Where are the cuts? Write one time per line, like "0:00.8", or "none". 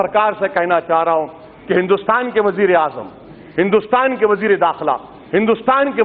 none